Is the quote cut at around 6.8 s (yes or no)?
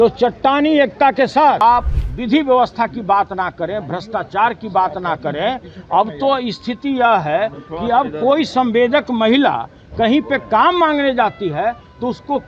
no